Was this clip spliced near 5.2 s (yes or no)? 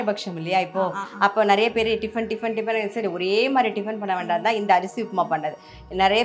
no